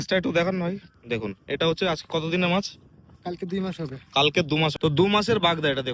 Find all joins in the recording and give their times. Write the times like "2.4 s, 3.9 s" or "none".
0.9 s, 4.7 s